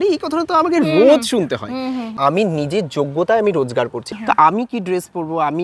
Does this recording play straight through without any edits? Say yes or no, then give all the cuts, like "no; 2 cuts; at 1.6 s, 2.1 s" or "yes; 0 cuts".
no; 2 cuts; at 2.2 s, 4.0 s